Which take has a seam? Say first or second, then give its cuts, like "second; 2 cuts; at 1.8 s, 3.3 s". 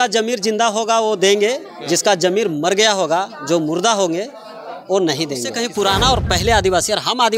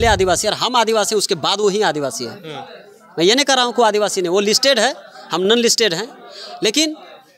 first; 1 cut; at 5.5 s